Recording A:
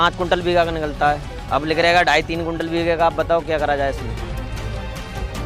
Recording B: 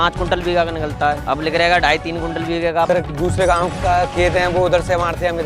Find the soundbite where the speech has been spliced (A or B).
B